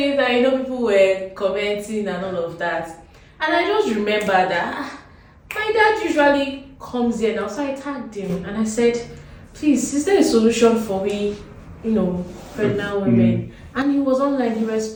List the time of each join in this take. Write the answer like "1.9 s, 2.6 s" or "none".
none